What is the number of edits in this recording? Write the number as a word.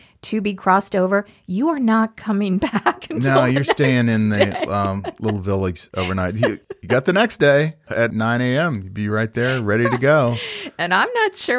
two